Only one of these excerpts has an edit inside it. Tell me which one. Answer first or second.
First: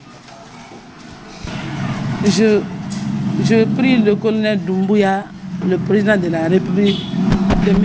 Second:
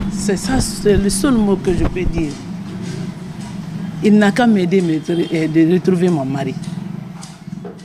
first